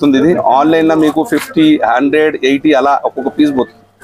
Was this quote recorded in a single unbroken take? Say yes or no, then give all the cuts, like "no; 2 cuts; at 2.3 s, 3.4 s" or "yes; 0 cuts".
yes; 0 cuts